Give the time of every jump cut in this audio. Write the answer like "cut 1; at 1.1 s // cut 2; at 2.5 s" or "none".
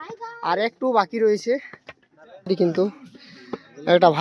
cut 1; at 2.5 s